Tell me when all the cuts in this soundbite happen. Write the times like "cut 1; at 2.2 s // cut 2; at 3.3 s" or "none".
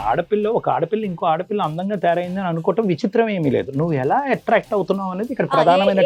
none

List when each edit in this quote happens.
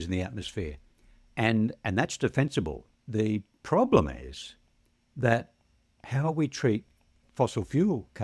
cut 1; at 2.9 s // cut 2; at 7.2 s

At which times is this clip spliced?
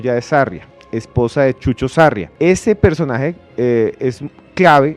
cut 1; at 2.3 s

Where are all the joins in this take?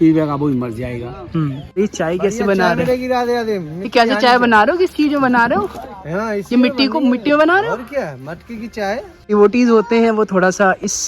cut 1; at 1.8 s // cut 2; at 9.3 s

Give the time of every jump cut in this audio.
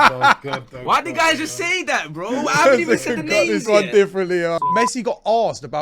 cut 1; at 4.6 s

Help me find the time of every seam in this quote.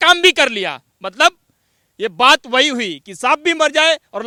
none

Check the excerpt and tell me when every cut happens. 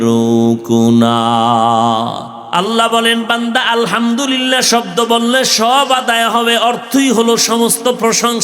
cut 1; at 2.3 s

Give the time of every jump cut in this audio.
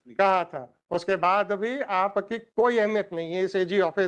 none

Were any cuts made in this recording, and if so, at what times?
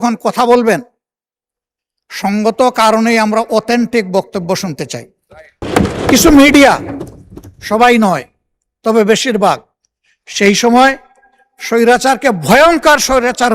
cut 1; at 5.6 s

